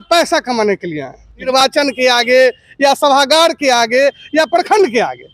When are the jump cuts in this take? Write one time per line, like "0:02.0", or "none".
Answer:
0:01.5